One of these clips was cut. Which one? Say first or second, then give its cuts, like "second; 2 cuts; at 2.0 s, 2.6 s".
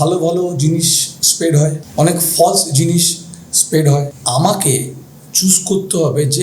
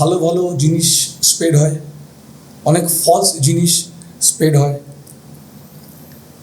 first; 2 cuts; at 1.8 s, 4.2 s